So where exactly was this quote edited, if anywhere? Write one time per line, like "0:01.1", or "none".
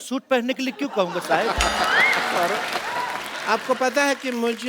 0:03.3